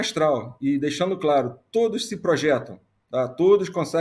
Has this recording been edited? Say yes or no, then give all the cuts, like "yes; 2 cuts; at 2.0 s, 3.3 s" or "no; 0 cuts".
no; 0 cuts